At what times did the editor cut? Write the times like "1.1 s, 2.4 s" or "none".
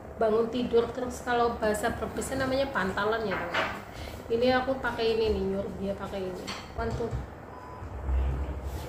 6.6 s

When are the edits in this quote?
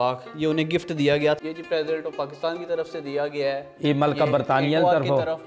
1.4 s

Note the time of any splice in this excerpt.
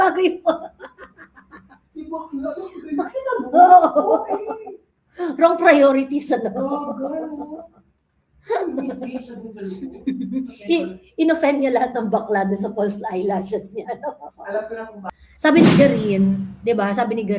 15.0 s

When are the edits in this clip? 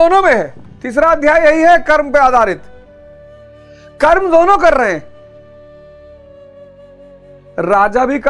2.6 s, 4.0 s

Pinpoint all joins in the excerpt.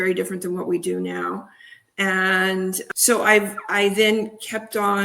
2.8 s

